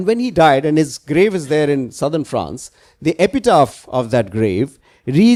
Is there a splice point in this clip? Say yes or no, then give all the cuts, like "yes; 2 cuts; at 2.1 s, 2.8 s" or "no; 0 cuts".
no; 0 cuts